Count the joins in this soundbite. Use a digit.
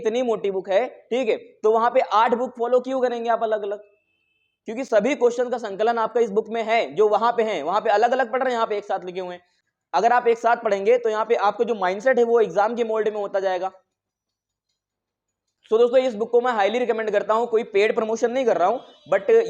0